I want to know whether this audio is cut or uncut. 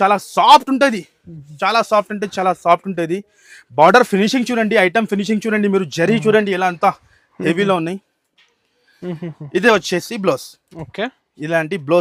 uncut